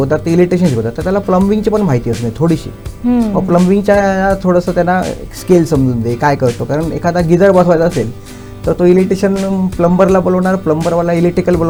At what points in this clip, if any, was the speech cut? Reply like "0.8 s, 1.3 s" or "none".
none